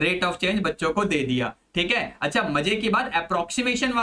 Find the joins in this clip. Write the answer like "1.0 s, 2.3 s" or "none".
none